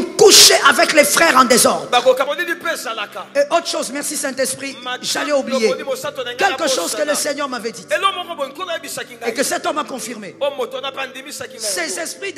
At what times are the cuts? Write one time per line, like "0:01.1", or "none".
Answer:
0:02.3